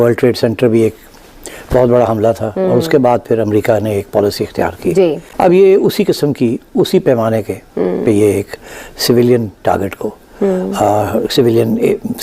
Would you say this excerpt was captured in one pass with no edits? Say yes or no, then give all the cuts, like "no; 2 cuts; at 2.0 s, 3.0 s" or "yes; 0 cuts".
no; 1 cut; at 5.3 s